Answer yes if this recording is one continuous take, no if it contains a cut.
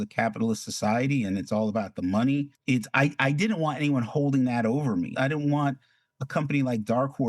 no